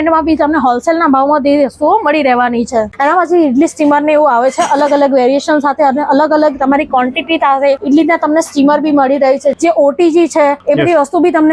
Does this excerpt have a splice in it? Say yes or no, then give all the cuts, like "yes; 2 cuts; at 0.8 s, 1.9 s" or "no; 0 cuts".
yes; 4 cuts; at 2.9 s, 7.8 s, 9.5 s, 10.6 s